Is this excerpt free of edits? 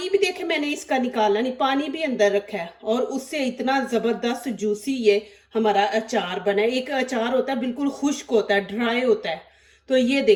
yes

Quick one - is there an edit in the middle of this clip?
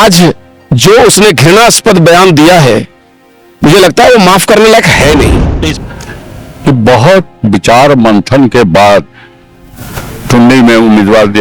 yes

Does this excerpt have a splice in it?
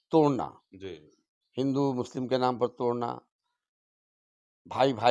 no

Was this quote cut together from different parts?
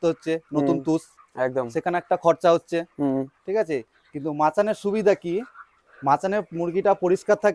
no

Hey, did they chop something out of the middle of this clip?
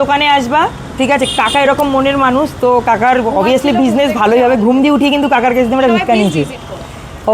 no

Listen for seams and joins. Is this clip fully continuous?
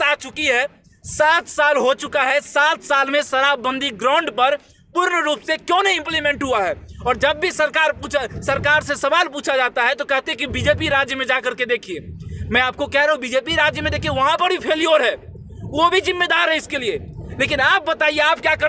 yes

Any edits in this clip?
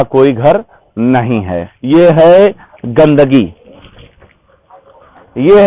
yes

